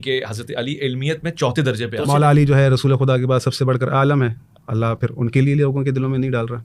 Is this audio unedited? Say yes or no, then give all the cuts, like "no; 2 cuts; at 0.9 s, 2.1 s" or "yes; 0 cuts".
no; 1 cut; at 2.0 s